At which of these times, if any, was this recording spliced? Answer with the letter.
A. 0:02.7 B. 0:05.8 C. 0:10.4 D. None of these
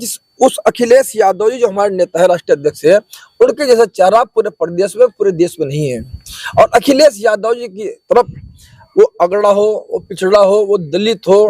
D